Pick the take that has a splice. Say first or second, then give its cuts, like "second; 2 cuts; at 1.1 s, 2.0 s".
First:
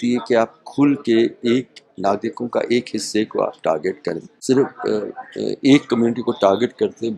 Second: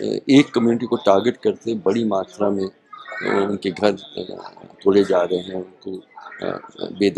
first; 1 cut; at 4.3 s